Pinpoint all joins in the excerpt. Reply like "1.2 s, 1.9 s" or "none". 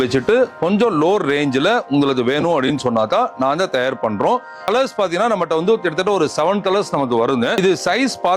4.7 s, 7.6 s

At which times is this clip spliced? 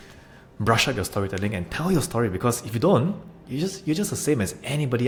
none

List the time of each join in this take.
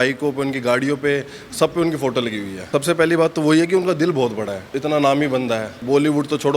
2.6 s, 4.7 s, 5.8 s

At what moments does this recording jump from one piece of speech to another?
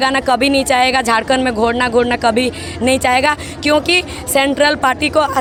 none

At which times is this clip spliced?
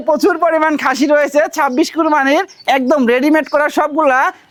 none

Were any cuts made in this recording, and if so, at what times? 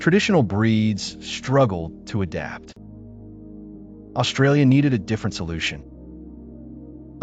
none

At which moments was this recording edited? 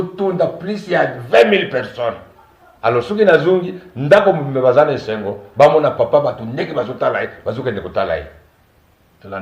none

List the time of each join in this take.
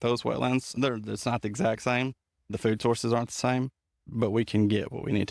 0.7 s, 2.5 s, 4.0 s

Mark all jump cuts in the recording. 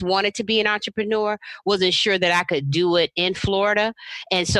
none

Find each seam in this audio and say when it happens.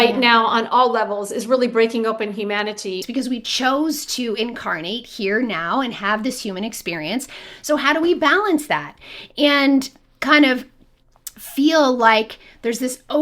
3.0 s

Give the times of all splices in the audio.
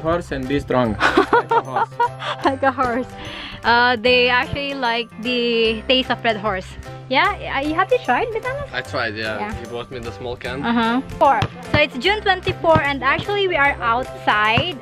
11.1 s

